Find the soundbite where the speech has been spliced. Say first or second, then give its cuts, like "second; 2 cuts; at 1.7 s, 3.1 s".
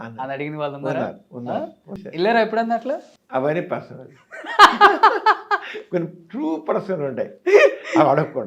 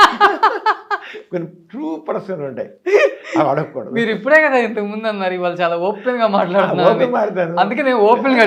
first; 2 cuts; at 2.0 s, 3.1 s